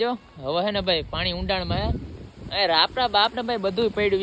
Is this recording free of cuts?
yes; 0 cuts

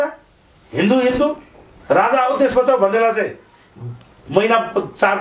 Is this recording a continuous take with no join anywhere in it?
yes; 0 cuts

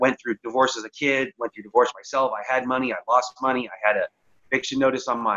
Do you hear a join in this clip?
no; 0 cuts

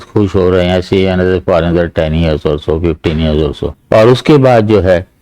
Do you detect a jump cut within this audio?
yes; 1 cut; at 3.7 s

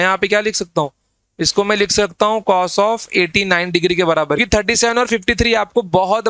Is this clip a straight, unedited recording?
no; 1 cut; at 4.4 s

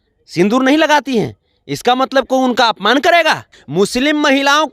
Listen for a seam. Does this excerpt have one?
yes; 1 cut; at 3.5 s

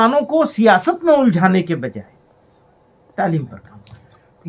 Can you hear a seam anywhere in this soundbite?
no; 0 cuts

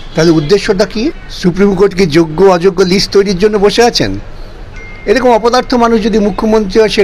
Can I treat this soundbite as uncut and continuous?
no; 1 cut; at 1.3 s

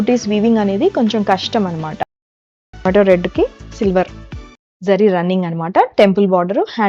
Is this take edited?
yes; 1 cut; at 2.5 s

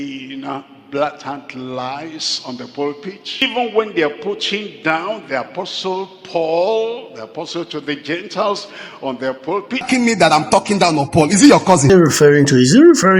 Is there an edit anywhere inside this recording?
yes; 3 cuts; at 3.4 s, 9.9 s, 11.9 s

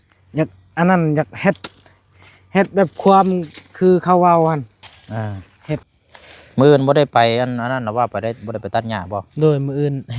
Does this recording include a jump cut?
yes; 1 cut; at 6.0 s

